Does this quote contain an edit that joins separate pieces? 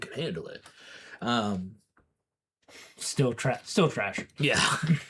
no; 0 cuts

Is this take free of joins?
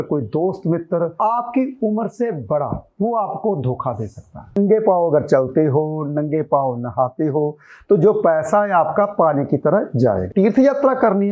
no; 2 cuts; at 4.6 s, 10.2 s

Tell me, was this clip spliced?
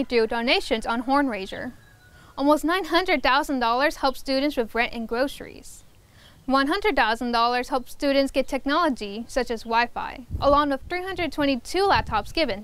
no; 0 cuts

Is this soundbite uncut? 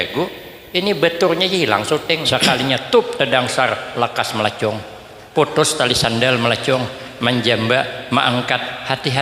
no; 1 cut; at 2.2 s

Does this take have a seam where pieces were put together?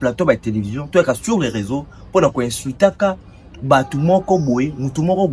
no; 0 cuts

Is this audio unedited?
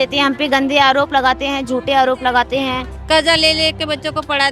no; 1 cut; at 2.9 s

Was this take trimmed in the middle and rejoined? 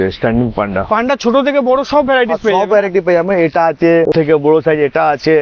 no; 0 cuts

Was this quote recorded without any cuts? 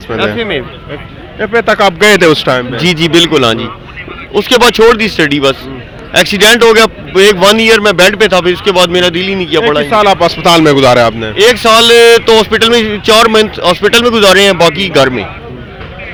yes; 0 cuts

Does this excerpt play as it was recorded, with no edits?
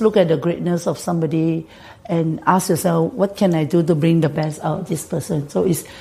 yes; 0 cuts

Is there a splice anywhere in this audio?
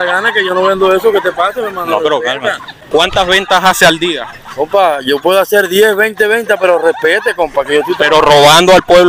yes; 2 cuts; at 2.7 s, 7.9 s

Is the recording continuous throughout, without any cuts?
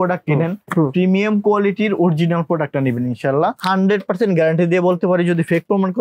no; 1 cut; at 3.6 s

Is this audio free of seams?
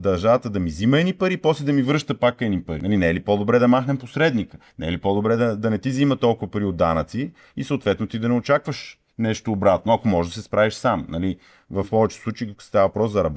no; 1 cut; at 2.7 s

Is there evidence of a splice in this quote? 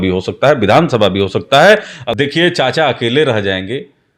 yes; 1 cut; at 1.9 s

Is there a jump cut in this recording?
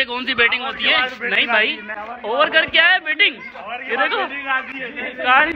no; 0 cuts

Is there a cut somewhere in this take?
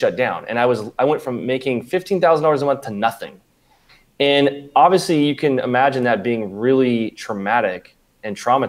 no; 0 cuts

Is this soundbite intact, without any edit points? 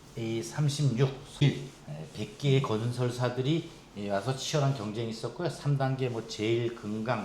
no; 1 cut; at 1.4 s

